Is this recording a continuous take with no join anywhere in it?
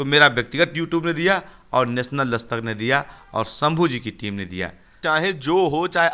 no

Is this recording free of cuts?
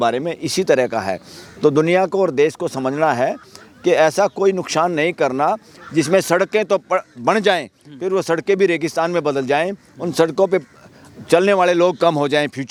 yes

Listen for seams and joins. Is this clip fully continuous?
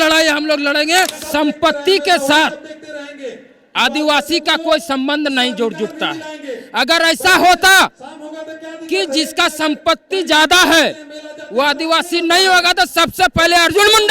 no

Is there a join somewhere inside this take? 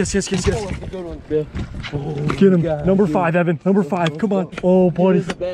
yes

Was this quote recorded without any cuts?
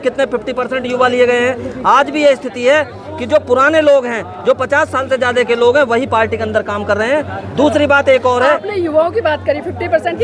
yes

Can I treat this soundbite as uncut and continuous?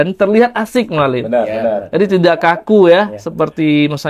yes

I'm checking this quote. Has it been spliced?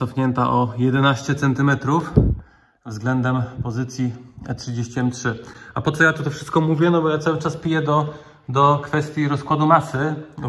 no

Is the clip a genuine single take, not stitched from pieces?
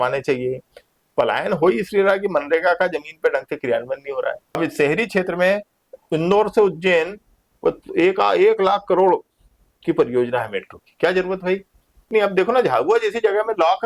no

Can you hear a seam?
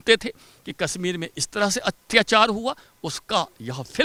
no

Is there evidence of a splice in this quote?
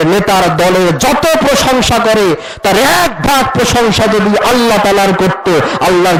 no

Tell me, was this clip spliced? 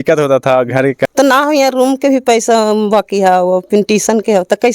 yes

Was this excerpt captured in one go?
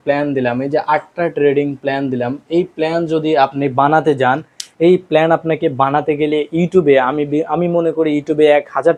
yes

